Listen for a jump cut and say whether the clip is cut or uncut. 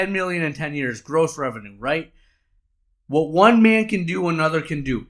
uncut